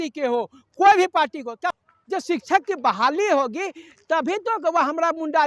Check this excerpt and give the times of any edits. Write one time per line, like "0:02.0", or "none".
0:01.8